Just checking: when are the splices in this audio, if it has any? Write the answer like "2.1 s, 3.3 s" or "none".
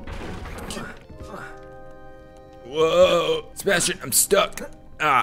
1.0 s, 3.5 s